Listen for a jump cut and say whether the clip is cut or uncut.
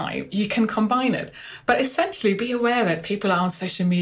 uncut